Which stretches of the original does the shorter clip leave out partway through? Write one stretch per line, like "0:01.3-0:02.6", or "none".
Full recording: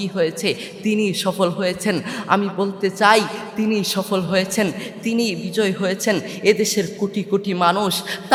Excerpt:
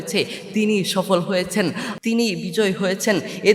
0:02.2-0:04.9